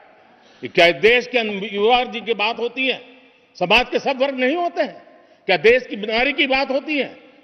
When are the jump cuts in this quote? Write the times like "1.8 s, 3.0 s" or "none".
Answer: none